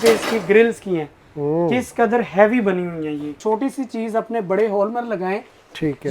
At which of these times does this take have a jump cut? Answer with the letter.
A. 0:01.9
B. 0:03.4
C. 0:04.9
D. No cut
B